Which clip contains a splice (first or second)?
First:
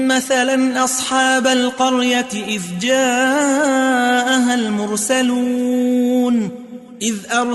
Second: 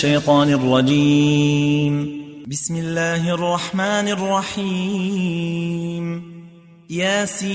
second